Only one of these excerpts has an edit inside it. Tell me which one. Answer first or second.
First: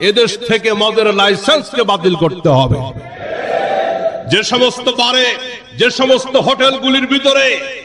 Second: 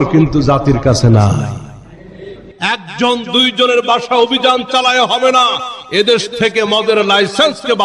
second